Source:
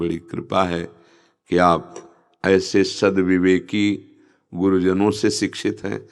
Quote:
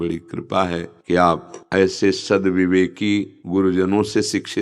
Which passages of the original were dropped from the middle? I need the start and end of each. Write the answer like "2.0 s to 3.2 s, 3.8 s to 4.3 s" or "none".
0.9 s to 1.4 s, 2.0 s to 2.3 s, 4.1 s to 4.4 s